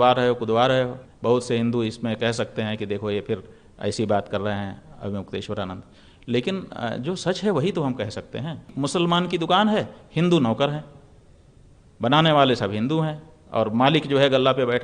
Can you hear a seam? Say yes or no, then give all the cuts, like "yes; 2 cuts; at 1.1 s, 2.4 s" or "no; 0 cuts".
yes; 2 cuts; at 1.1 s, 8.7 s